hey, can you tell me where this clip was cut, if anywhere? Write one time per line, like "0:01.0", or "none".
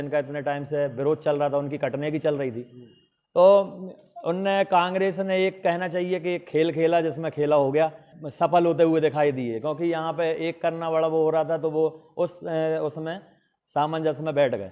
0:08.1

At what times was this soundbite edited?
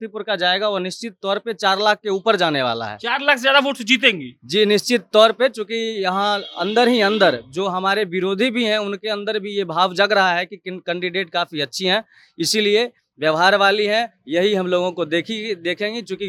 none

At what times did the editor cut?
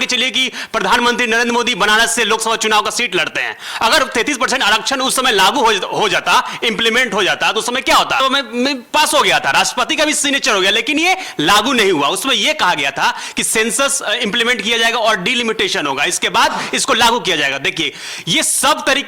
0:08.2

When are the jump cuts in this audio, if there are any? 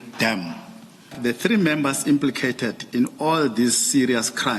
0:01.2

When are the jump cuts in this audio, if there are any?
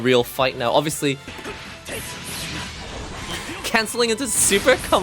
0:01.3

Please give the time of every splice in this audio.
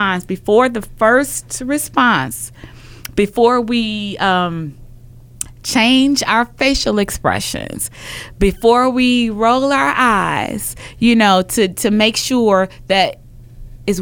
none

